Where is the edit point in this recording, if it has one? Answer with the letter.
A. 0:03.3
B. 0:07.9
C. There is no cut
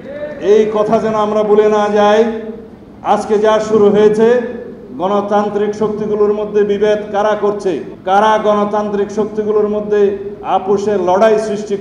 B